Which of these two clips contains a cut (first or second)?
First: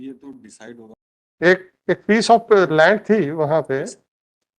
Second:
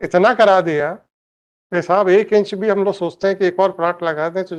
first